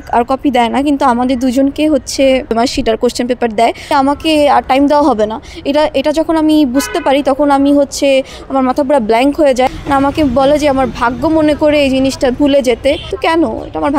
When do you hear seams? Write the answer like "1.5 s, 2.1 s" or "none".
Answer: 2.5 s, 3.9 s, 9.7 s, 13.1 s